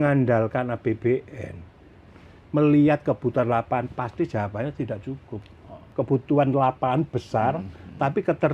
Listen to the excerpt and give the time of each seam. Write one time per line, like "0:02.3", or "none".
0:05.9